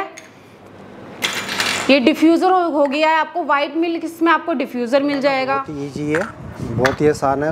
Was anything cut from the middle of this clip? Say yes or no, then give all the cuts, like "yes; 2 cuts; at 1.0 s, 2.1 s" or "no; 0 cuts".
yes; 1 cut; at 5.7 s